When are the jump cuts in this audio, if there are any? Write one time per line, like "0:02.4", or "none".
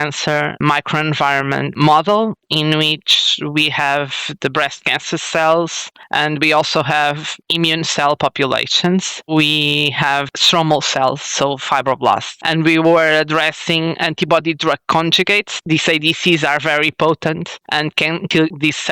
0:09.3
0:15.5